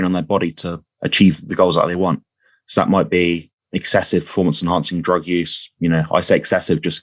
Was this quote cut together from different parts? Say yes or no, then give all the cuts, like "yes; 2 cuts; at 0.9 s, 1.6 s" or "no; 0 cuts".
no; 0 cuts